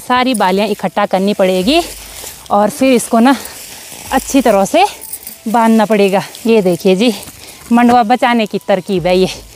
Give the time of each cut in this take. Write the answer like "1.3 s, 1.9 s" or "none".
none